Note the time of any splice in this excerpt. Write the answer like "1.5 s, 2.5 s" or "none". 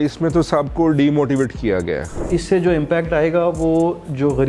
2.1 s